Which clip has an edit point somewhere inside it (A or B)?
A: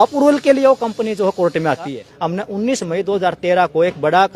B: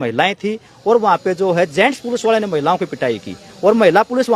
A